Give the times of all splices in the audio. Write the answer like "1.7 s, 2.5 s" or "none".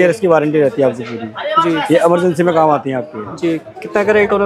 none